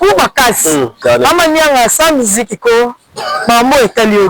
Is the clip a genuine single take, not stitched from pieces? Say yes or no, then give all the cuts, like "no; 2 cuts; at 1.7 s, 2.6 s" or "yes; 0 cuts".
no; 1 cut; at 1.0 s